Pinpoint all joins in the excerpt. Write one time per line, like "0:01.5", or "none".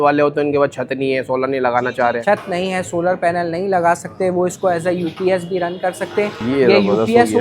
0:01.8